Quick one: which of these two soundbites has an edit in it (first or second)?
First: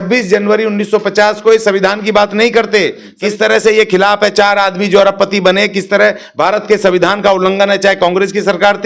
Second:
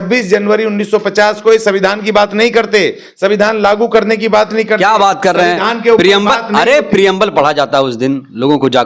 first